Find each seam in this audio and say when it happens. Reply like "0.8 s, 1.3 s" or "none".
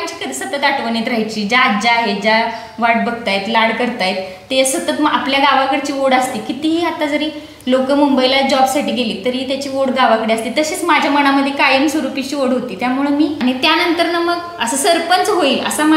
13.4 s